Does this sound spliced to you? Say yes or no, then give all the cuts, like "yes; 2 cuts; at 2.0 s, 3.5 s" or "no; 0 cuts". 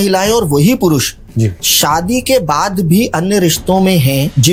no; 0 cuts